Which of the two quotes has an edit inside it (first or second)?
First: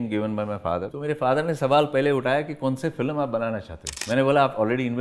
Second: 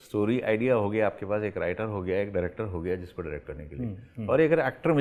first